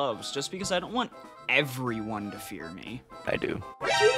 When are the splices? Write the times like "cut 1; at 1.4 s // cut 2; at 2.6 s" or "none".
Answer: none